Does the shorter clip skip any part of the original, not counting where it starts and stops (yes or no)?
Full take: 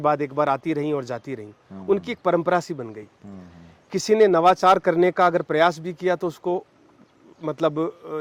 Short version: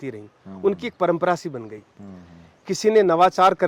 no